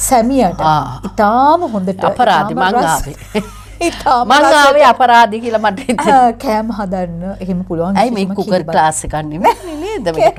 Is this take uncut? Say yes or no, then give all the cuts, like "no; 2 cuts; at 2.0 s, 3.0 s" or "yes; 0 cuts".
yes; 0 cuts